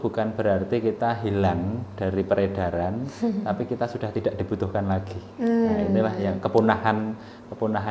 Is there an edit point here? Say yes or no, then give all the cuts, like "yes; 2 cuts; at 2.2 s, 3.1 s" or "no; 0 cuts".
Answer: no; 0 cuts